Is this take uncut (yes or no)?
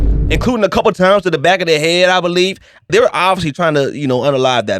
no